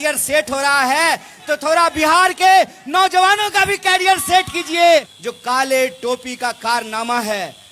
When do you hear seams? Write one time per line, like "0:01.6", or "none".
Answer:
0:05.1